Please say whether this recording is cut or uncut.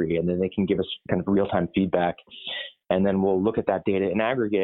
uncut